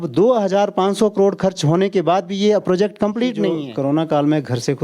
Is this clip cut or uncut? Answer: cut